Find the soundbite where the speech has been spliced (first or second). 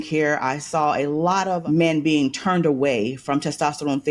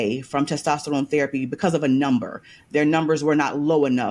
first